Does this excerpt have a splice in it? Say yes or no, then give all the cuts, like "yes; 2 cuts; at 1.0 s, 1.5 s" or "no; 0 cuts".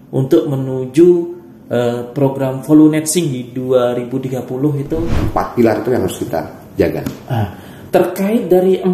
yes; 1 cut; at 5.2 s